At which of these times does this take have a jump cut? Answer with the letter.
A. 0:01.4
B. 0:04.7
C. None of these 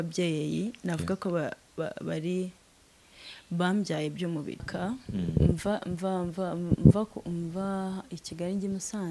B